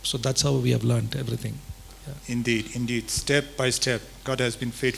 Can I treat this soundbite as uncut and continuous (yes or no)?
yes